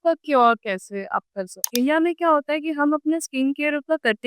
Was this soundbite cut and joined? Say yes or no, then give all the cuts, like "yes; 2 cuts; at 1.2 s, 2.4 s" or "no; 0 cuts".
yes; 1 cut; at 1.6 s